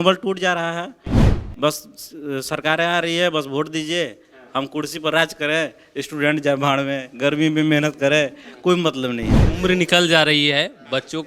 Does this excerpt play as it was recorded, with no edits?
no; 1 cut; at 9.4 s

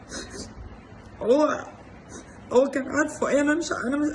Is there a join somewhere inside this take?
no; 0 cuts

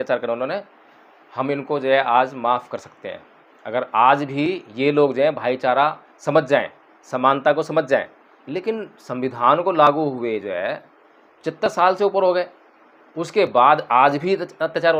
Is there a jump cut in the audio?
no; 0 cuts

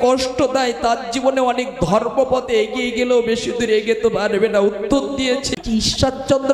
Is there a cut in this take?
yes; 1 cut; at 5.5 s

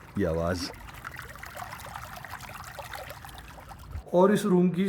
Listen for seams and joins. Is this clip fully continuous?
no; 2 cuts; at 1.9 s, 4.0 s

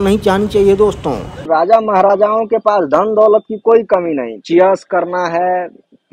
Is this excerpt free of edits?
no; 2 cuts; at 1.3 s, 4.4 s

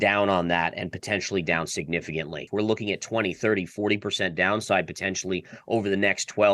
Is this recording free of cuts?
no; 1 cut; at 2.4 s

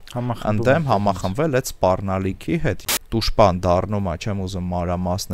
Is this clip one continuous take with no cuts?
no; 1 cut; at 2.8 s

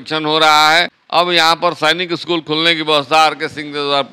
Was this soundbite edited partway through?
yes; 1 cut; at 1.3 s

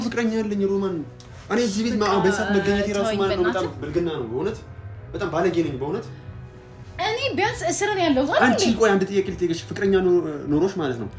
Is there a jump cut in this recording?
no; 0 cuts

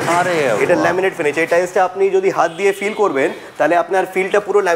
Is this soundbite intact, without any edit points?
yes; 0 cuts

